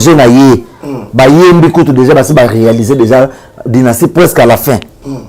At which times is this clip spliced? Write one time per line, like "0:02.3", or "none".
none